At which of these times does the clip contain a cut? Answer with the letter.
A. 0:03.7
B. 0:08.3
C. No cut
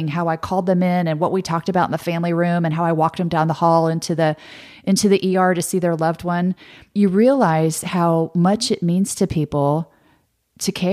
C